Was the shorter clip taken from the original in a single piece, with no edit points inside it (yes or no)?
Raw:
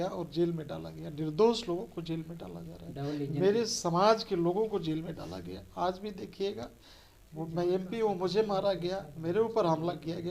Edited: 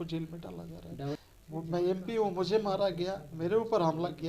no